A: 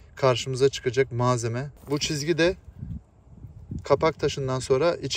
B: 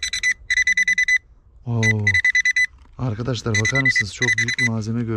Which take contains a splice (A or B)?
A